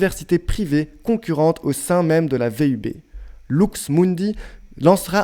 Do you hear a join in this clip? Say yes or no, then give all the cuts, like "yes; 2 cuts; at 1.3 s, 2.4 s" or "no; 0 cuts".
no; 0 cuts